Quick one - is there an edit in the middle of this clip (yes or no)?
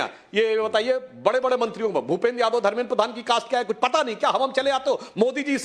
no